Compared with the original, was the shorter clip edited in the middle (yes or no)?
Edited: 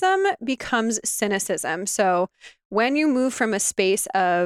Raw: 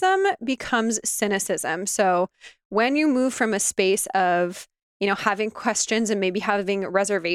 no